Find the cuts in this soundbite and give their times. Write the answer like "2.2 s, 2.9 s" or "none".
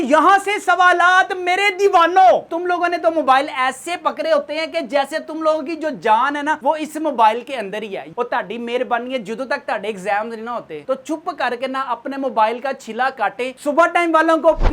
2.5 s, 8.0 s, 13.5 s

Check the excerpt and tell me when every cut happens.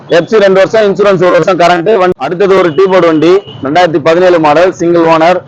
2.1 s

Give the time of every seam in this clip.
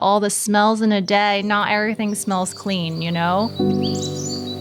3.5 s

